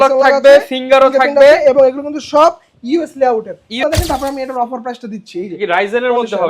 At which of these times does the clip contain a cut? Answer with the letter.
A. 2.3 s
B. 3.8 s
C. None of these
B